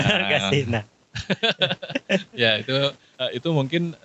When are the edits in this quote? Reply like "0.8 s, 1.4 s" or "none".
3.1 s